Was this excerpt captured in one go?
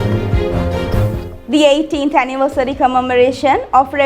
no; 1 cut; at 1.2 s

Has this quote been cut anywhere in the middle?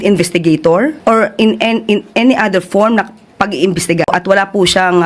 no; 0 cuts

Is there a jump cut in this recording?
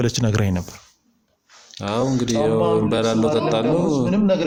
no; 0 cuts

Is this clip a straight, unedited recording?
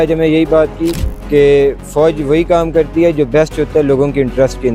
yes; 0 cuts

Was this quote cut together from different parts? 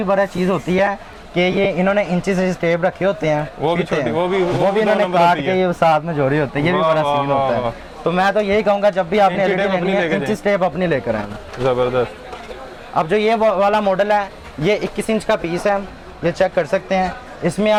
no; 0 cuts

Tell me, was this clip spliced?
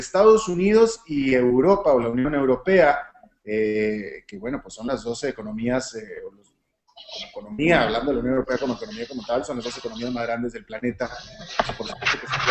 no; 0 cuts

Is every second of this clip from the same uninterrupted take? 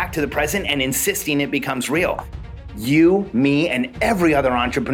no; 1 cut; at 2.4 s

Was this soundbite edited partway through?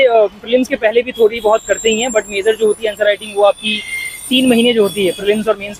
no; 0 cuts

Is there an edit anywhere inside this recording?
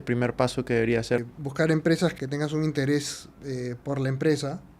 yes; 2 cuts; at 1.2 s, 2.1 s

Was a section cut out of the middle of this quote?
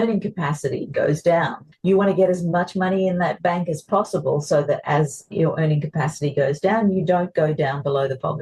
no; 0 cuts

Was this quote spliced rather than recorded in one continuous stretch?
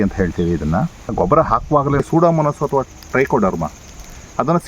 yes; 2 cuts; at 1.1 s, 2.0 s

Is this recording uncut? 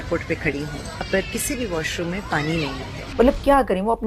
no; 2 cuts; at 1.1 s, 3.0 s

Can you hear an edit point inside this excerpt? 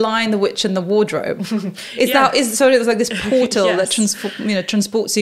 no; 0 cuts

